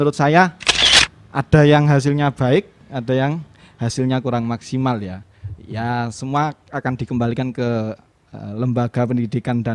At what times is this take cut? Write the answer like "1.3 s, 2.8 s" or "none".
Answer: none